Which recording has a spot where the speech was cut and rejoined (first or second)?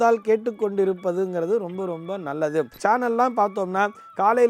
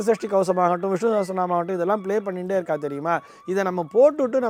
first